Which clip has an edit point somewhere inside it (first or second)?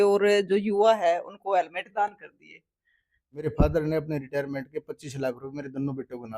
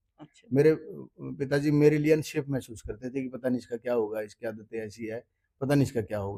first